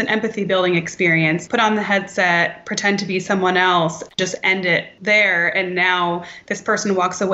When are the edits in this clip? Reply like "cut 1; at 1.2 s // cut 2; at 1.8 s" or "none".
cut 1; at 1.4 s // cut 2; at 4.9 s